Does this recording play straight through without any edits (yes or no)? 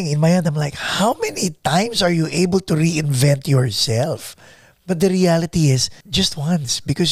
no